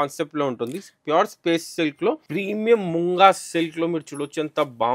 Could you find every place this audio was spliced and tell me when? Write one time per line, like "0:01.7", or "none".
0:02.2